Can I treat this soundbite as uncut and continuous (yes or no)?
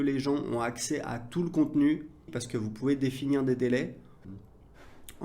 no